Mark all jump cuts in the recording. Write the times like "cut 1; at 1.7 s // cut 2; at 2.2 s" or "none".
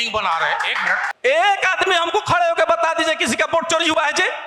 cut 1; at 1.1 s